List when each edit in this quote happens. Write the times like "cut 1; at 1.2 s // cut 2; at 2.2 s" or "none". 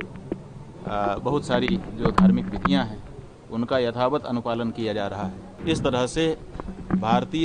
cut 1; at 5.5 s